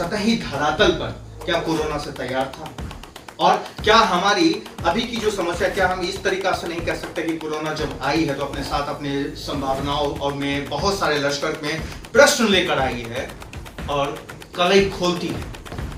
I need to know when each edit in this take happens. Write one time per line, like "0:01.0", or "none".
none